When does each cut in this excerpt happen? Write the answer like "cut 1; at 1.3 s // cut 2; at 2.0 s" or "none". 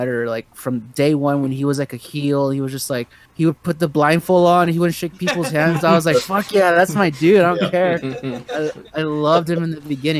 none